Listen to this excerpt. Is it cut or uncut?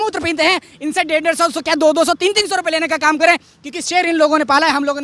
uncut